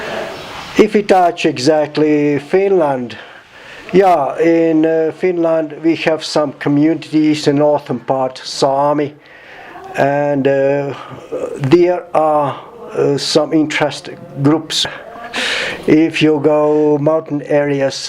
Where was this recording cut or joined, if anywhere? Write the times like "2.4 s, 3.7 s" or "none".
7.4 s, 14.8 s